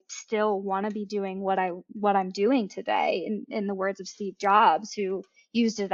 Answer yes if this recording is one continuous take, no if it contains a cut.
yes